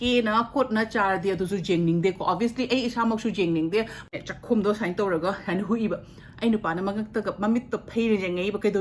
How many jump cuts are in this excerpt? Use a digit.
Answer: 1